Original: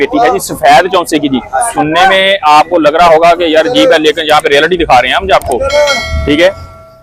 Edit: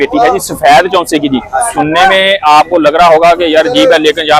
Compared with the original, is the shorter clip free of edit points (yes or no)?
yes